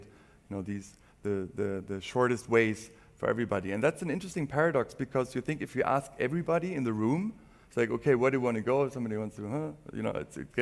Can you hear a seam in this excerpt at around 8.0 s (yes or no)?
yes